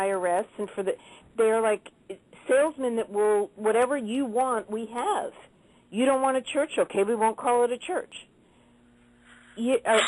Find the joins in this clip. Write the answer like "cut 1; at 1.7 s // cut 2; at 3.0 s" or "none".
cut 1; at 1.0 s